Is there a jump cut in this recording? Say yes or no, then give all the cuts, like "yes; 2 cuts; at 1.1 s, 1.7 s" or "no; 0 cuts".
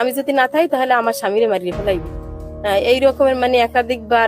no; 0 cuts